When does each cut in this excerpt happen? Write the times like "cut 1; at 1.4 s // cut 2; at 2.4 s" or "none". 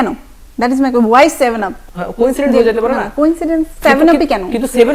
cut 1; at 1.7 s